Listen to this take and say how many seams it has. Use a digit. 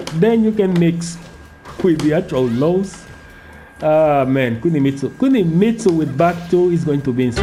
0